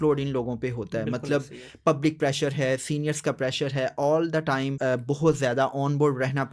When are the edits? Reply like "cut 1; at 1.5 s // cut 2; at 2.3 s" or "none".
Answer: cut 1; at 4.7 s